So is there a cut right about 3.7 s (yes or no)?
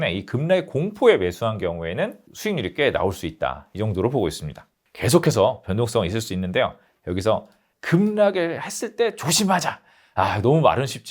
no